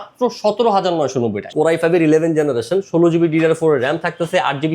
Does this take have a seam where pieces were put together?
yes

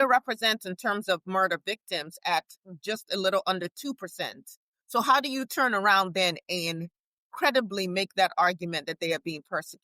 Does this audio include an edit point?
no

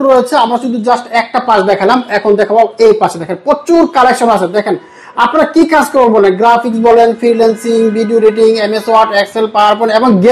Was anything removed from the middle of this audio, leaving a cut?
no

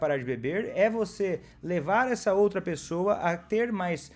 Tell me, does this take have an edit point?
no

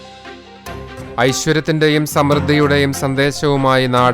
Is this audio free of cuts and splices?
no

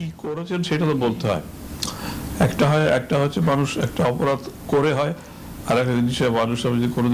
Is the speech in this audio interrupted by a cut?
no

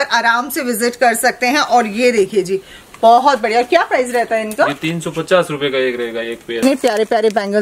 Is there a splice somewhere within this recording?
yes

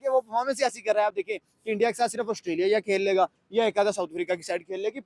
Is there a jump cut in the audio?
no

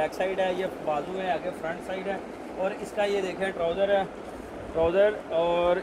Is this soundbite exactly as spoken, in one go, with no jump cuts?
yes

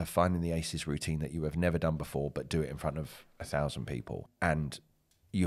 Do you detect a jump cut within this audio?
yes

